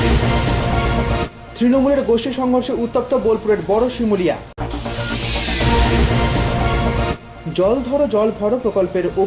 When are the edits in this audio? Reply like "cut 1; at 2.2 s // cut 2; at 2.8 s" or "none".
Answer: cut 1; at 1.4 s // cut 2; at 4.5 s // cut 3; at 7.3 s